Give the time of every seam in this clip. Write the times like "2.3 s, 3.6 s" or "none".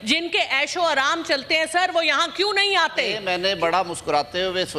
3.2 s